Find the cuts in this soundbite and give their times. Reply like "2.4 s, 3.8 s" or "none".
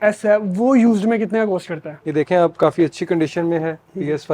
1.9 s